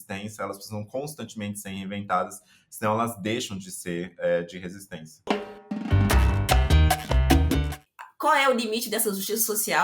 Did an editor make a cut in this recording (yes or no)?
yes